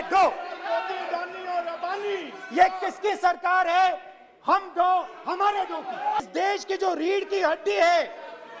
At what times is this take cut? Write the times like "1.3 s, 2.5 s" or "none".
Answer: 6.2 s